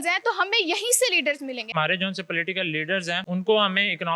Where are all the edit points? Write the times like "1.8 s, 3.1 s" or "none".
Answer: 1.7 s, 3.2 s